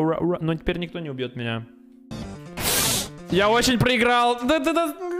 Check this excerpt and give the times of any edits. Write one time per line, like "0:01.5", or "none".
0:02.1